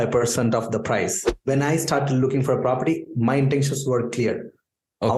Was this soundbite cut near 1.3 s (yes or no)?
yes